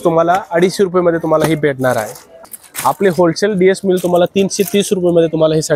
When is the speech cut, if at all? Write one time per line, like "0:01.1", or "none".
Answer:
0:02.3